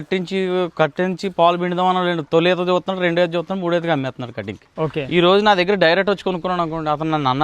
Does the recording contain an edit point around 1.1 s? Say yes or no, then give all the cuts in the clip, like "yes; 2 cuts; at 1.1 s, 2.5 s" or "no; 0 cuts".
no; 1 cut; at 5.0 s